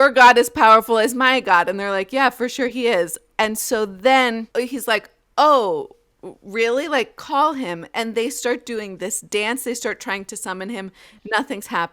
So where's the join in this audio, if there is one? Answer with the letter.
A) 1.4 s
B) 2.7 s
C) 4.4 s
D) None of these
C